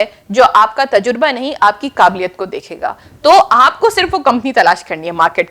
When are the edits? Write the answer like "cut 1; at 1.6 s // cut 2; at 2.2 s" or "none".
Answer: none